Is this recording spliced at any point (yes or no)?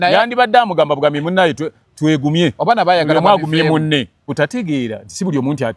yes